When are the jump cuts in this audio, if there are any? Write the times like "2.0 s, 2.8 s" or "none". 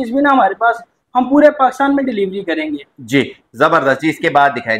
none